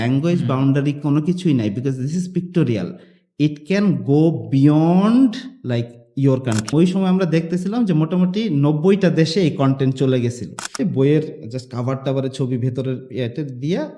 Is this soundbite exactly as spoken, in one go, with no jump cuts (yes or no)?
no